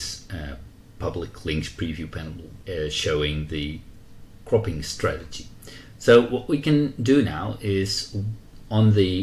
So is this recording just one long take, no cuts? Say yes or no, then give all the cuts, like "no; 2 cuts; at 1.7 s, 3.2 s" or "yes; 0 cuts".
no; 1 cut; at 2.6 s